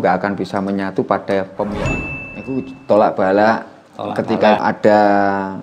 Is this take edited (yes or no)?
yes